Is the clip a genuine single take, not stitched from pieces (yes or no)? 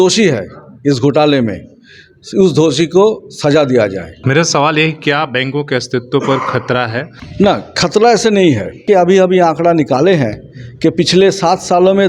no